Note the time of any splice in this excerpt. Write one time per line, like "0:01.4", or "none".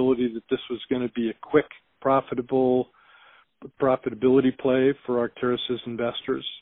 none